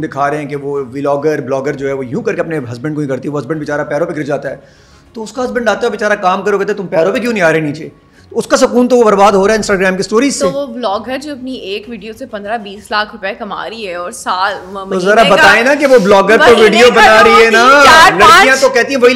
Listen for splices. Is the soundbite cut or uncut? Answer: uncut